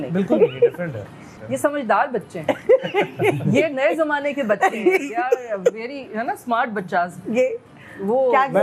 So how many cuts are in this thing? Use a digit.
1